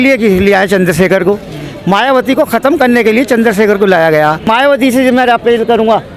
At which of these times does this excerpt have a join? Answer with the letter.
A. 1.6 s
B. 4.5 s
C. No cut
B